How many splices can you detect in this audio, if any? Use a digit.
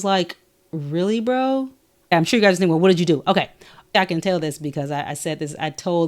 2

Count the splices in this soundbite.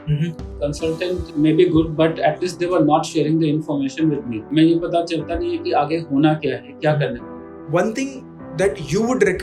3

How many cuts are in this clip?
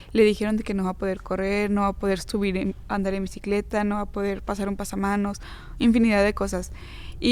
0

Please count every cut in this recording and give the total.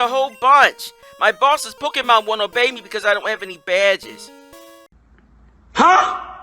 1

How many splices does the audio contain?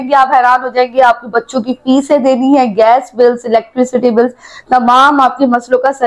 0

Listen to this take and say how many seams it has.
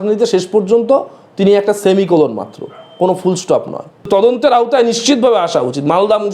1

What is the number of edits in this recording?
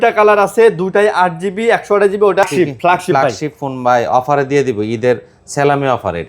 1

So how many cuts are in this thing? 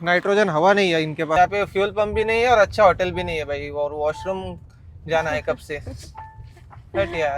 1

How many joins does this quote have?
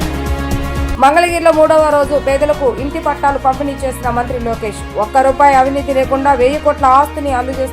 1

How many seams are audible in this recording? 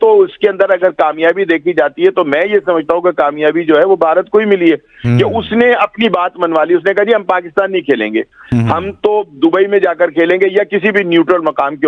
0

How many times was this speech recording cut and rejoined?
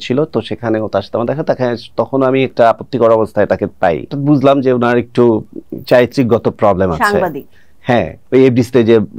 2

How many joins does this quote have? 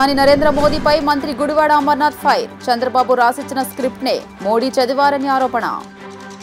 0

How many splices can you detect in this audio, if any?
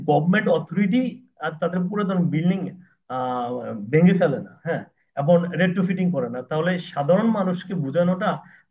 0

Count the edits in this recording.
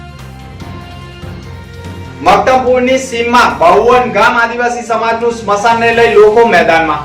1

